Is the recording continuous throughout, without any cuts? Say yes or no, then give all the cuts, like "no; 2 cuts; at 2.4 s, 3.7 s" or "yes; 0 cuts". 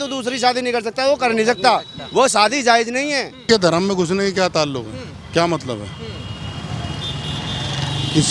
no; 1 cut; at 3.5 s